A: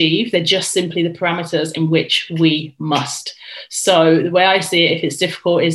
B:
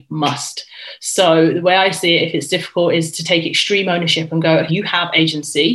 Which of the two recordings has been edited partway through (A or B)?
B